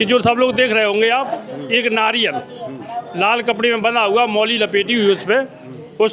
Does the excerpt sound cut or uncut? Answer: uncut